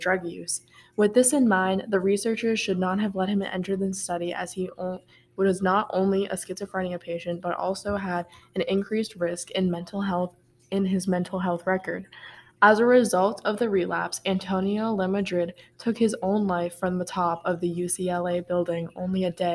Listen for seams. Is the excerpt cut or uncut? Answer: uncut